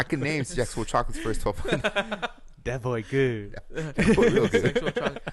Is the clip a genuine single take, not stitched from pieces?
yes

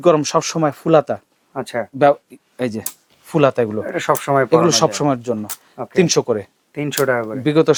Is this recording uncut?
yes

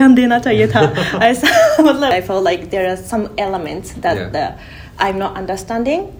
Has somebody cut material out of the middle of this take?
no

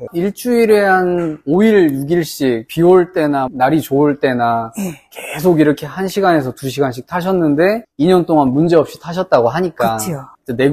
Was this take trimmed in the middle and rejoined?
no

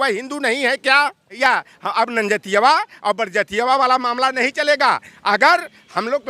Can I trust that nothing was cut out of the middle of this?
no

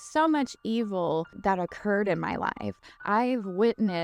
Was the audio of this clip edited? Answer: yes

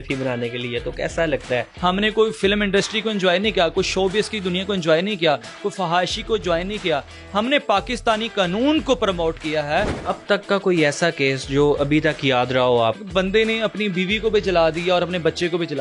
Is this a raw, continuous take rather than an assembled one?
no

